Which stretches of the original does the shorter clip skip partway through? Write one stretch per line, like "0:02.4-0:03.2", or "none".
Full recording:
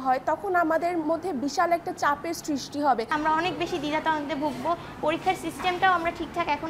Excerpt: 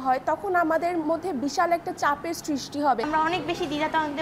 0:03.1-0:03.2